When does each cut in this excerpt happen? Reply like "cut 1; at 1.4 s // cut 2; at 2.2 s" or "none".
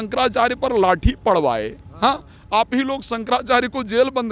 none